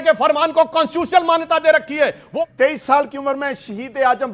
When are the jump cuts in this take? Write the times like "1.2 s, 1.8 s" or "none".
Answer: 2.3 s